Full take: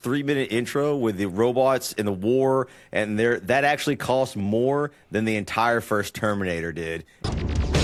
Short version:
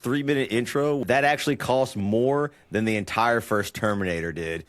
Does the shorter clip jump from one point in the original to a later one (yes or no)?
yes